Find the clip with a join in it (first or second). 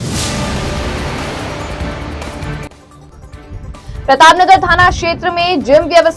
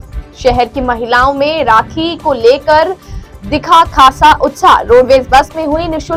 first